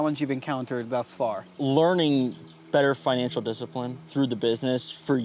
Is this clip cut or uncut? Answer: cut